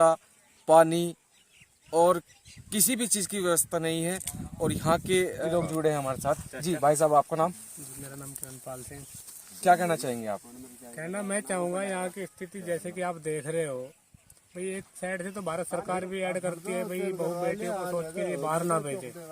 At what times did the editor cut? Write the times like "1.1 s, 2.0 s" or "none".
5.5 s